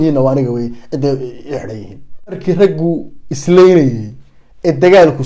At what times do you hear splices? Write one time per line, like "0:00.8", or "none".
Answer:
0:02.4